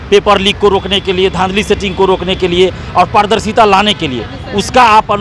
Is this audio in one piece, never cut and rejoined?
yes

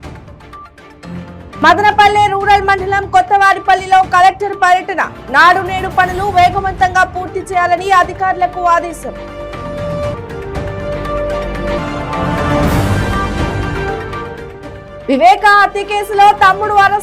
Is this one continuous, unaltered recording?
no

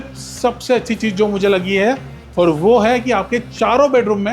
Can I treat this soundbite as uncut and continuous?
yes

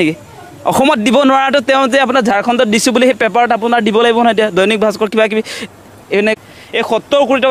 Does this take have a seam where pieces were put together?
yes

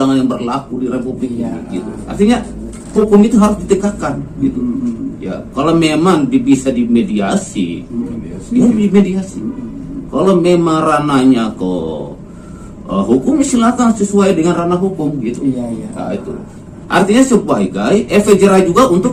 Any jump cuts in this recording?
no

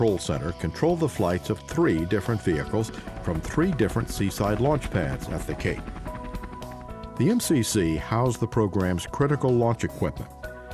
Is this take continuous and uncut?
no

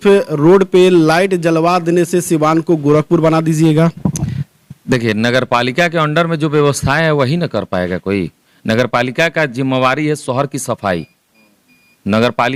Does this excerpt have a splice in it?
no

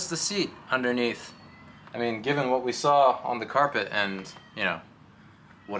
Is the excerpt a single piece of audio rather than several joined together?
yes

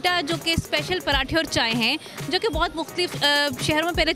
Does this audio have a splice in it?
no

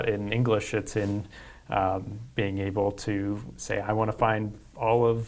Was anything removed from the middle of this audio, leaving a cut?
no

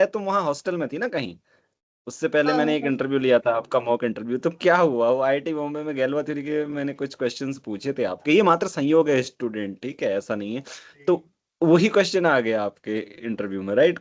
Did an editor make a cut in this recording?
no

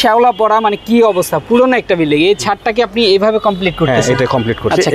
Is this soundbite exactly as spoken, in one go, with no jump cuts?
yes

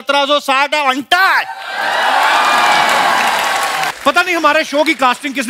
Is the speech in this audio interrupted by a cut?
yes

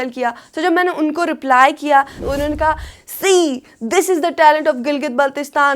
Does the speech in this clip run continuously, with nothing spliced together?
no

